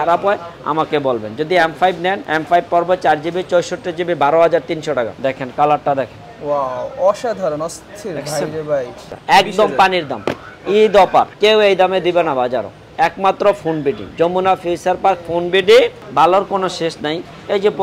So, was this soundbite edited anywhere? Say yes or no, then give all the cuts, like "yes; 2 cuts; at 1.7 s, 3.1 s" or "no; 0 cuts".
yes; 5 cuts; at 2.2 s, 5.1 s, 9.1 s, 11.3 s, 16.0 s